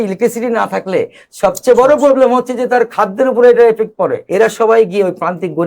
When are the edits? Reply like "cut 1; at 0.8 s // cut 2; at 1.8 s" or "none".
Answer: cut 1; at 4.2 s